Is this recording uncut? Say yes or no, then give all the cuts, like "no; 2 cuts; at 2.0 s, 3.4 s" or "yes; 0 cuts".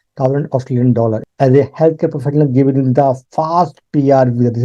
no; 1 cut; at 1.2 s